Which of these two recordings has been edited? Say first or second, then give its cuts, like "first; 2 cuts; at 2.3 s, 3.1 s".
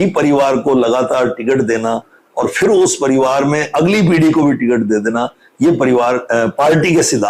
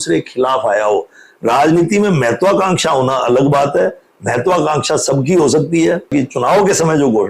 second; 1 cut; at 6.1 s